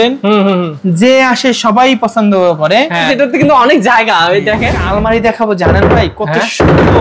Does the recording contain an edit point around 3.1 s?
yes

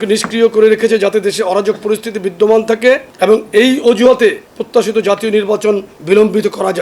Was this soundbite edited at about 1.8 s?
no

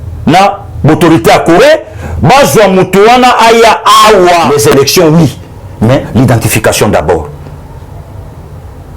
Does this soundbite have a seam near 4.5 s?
yes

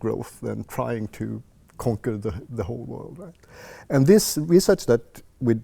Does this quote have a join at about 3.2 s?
no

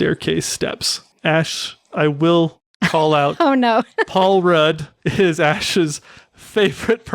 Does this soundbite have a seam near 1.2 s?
yes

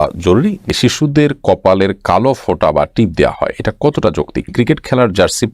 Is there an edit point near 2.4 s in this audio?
no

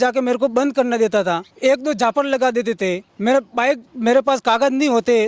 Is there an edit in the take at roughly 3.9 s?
yes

